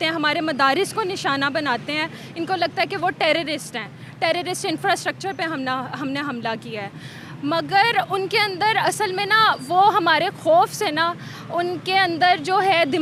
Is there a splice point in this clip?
no; 0 cuts

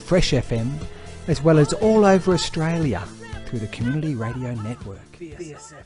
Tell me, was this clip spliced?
yes; 1 cut; at 5.0 s

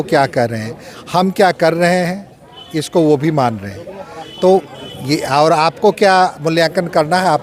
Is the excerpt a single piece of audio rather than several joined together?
yes; 0 cuts

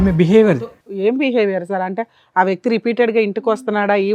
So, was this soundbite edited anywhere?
no; 0 cuts

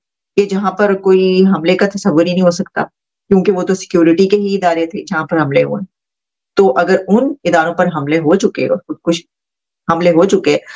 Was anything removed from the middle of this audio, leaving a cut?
no; 0 cuts

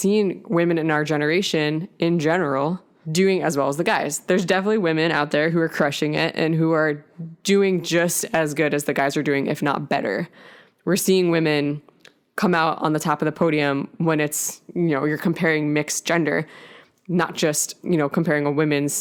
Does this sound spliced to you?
no; 0 cuts

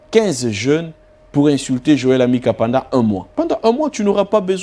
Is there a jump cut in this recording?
yes; 1 cut; at 3.3 s

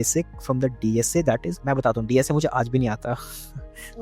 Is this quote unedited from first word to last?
no; 1 cut; at 1.5 s

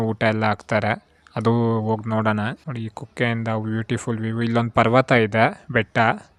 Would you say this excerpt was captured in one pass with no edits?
yes; 0 cuts

